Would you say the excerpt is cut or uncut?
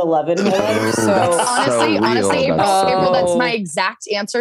uncut